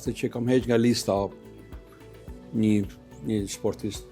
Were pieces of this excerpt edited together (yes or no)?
no